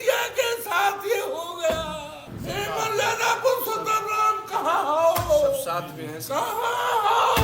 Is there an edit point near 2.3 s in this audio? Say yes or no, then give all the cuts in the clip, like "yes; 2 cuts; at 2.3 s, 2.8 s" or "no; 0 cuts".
yes; 1 cut; at 2.3 s